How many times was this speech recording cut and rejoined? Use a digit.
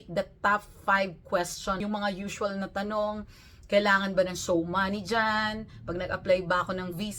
1